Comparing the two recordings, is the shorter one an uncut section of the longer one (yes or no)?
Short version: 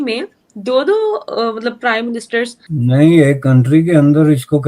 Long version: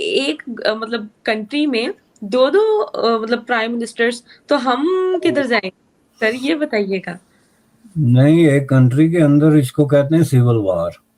no